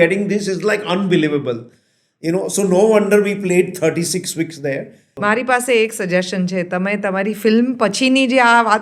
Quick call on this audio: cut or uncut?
cut